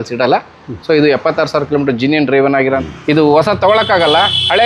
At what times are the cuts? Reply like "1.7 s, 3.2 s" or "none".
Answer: 2.8 s